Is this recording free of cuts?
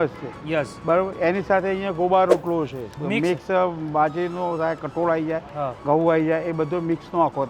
yes; 0 cuts

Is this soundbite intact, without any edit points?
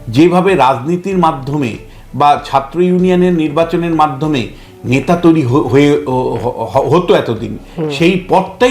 yes; 0 cuts

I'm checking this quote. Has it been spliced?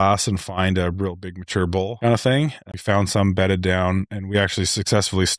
yes; 2 cuts; at 1.9 s, 2.6 s

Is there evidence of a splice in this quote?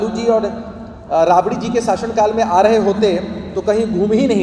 no; 0 cuts

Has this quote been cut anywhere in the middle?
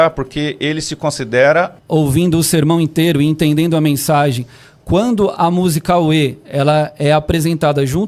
yes; 1 cut; at 1.8 s

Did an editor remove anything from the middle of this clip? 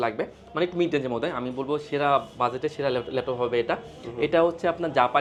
no; 0 cuts

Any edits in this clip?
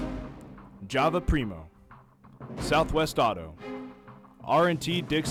no; 0 cuts

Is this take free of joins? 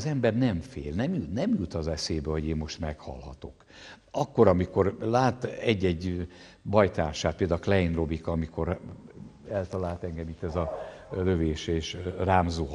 yes; 0 cuts

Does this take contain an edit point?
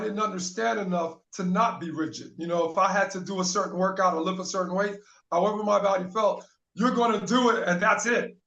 no; 0 cuts

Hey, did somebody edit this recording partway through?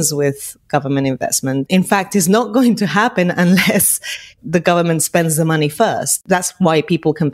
yes; 2 cuts; at 1.7 s, 6.2 s

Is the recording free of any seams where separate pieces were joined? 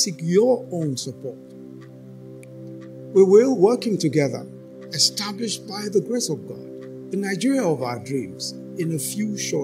yes; 0 cuts

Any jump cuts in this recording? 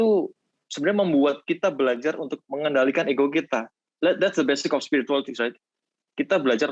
no; 0 cuts

